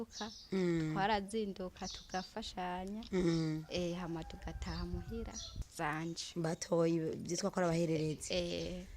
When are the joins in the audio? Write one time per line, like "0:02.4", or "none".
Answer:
0:05.6